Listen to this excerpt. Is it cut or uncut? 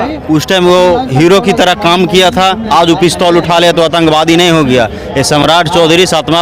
uncut